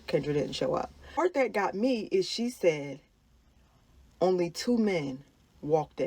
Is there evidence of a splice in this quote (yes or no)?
yes